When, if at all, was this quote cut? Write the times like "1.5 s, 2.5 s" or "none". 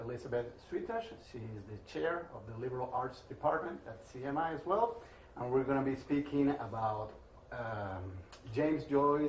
none